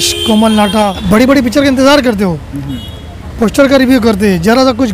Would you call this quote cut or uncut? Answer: cut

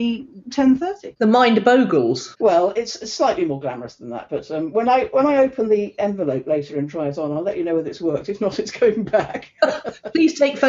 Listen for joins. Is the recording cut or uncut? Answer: cut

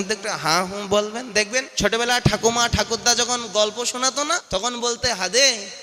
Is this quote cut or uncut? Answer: cut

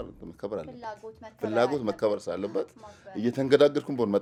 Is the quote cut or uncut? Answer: uncut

